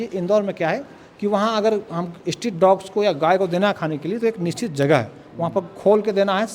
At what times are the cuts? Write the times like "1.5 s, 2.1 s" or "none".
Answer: none